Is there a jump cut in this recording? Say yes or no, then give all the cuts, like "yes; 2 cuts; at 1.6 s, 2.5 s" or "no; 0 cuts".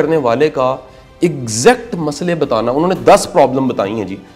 no; 0 cuts